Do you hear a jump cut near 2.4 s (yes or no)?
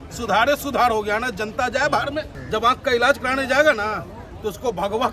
yes